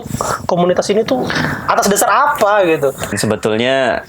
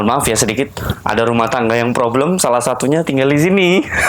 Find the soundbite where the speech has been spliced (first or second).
first